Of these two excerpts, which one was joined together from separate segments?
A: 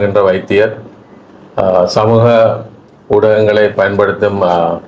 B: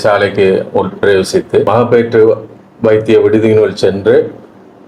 B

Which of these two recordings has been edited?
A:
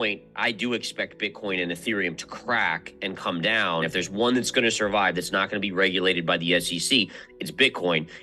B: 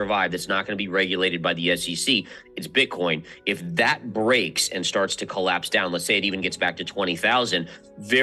A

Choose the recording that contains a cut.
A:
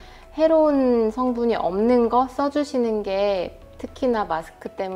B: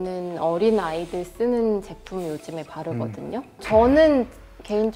B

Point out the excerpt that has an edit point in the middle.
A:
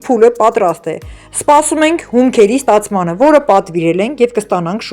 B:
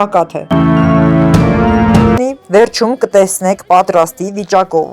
B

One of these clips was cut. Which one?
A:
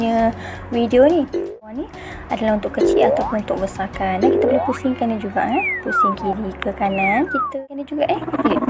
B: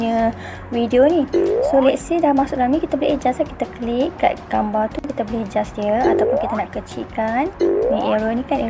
A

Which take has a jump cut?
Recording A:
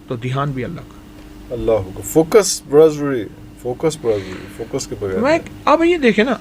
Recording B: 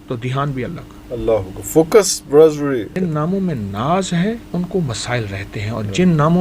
B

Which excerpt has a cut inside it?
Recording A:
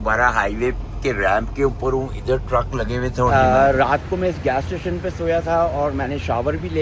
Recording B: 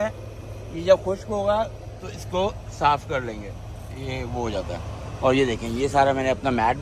A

